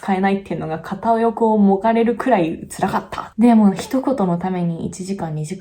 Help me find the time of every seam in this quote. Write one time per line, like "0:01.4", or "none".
0:03.2